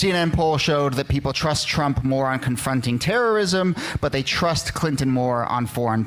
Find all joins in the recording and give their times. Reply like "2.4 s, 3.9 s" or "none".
none